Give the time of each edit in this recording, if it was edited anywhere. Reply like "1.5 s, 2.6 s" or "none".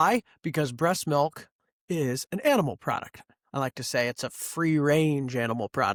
none

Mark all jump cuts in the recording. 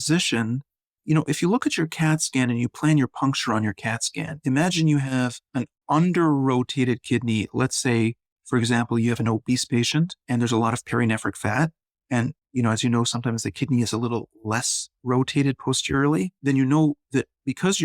5.4 s, 10.2 s, 16.3 s

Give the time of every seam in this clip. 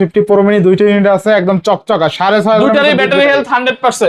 none

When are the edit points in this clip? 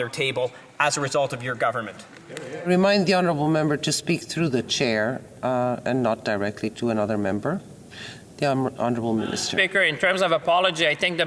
none

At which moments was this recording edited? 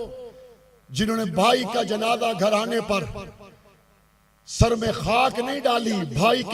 none

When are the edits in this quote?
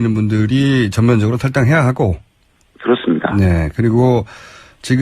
3.6 s

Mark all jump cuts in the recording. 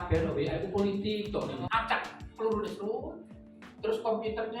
1.6 s

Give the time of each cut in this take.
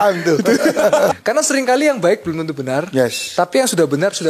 1.1 s

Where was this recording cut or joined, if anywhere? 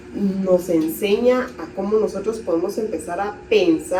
none

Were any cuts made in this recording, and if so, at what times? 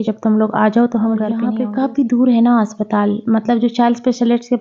1.5 s

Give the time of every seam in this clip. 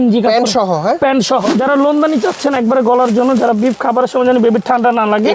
1.5 s

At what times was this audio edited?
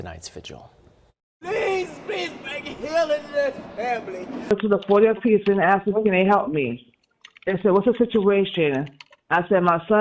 4.5 s

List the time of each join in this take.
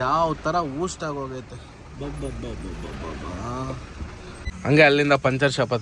4.4 s

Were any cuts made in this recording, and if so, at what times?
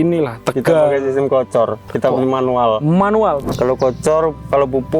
1.8 s, 3.5 s

